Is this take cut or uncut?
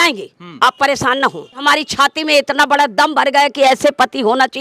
cut